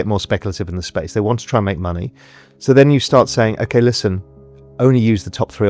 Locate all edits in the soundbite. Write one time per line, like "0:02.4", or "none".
none